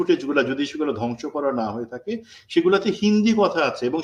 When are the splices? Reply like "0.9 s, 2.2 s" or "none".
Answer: none